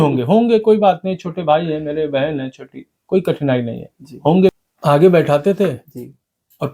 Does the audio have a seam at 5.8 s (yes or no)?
no